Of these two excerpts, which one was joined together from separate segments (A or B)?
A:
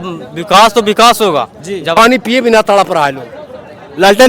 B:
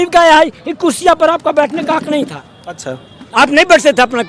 A